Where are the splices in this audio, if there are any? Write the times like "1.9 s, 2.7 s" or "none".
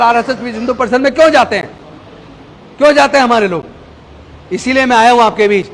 none

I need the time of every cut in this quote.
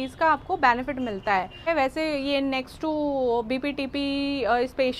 1.7 s

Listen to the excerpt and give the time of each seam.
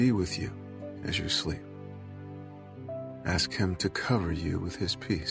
1.6 s, 3.2 s

